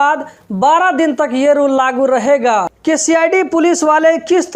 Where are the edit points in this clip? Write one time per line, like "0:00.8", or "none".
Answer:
0:02.7